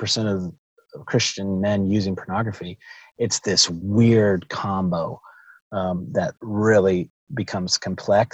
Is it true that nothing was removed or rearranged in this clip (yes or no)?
yes